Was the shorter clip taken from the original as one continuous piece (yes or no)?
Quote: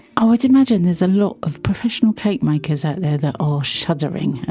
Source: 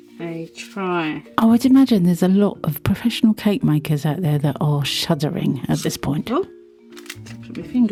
yes